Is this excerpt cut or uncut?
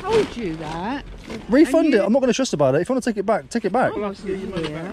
cut